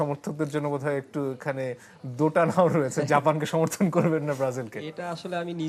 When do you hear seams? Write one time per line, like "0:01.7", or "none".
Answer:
none